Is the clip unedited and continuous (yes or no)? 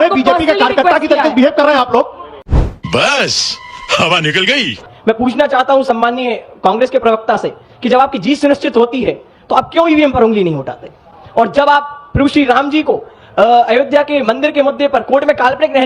no